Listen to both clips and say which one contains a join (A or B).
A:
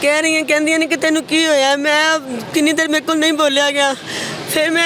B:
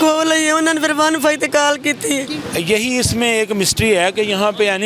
B